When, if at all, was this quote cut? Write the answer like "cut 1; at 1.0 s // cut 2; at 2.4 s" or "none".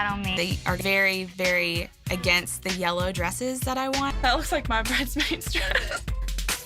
cut 1; at 4.1 s